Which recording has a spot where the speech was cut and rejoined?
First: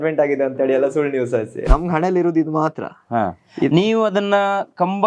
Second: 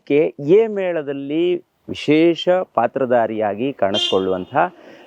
first; 1 cut; at 1.6 s

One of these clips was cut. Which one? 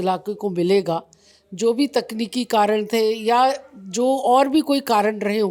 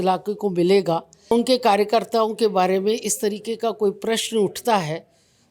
second; 1 cut; at 1.3 s

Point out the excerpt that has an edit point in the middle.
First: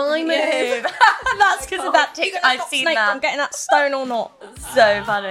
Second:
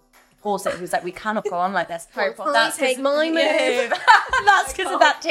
second; 1 cut; at 2.1 s

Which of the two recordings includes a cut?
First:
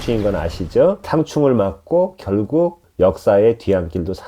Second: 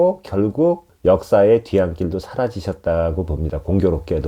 first; 1 cut; at 1.0 s

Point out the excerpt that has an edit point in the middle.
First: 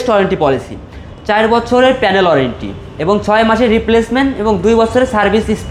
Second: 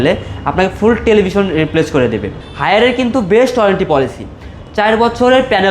second; 1 cut; at 2.4 s

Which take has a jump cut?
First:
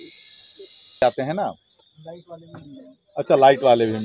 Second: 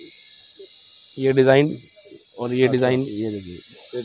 first; 1 cut; at 1.0 s

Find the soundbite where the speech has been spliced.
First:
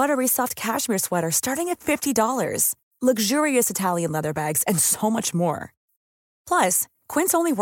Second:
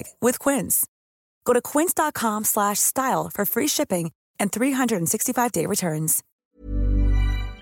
second; 1 cut; at 6.2 s

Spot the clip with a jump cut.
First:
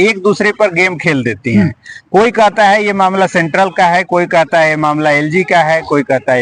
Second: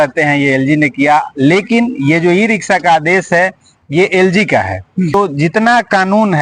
second; 1 cut; at 5.1 s

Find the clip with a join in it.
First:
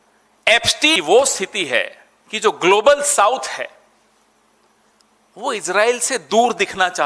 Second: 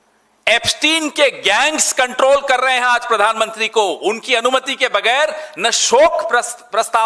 first; 1 cut; at 1.0 s

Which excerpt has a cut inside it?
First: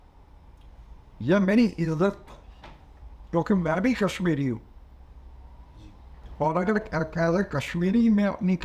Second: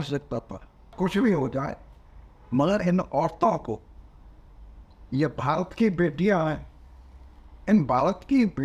second; 1 cut; at 0.9 s

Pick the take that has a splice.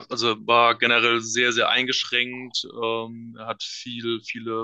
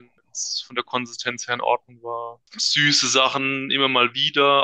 second; 1 cut; at 2.4 s

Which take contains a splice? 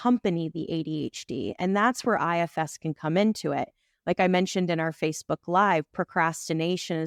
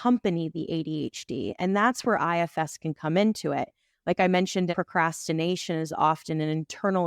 second; 1 cut; at 4.7 s

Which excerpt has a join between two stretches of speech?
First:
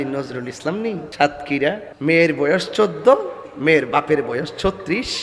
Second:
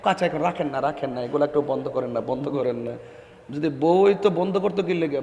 first; 2 cuts; at 1.1 s, 1.9 s

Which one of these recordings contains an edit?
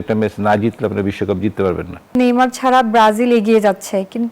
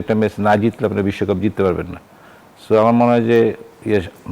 first; 1 cut; at 2.2 s

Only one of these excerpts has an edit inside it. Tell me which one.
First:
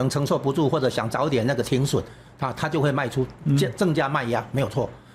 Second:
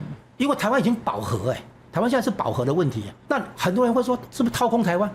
second; 2 cuts; at 3.1 s, 4.3 s

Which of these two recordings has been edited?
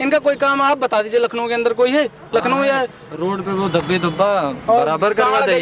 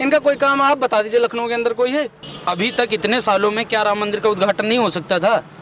second; 1 cut; at 2.2 s

